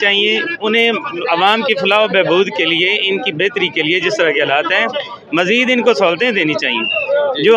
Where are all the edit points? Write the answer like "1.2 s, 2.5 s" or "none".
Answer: none